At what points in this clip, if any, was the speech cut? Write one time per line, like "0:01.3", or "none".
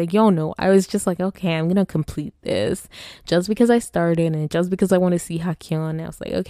none